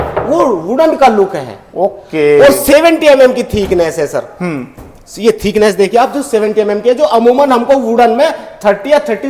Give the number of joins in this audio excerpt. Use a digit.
0